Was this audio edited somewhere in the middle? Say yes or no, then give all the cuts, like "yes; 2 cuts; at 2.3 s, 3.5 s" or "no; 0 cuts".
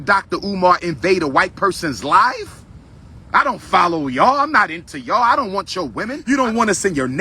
yes; 1 cut; at 6.2 s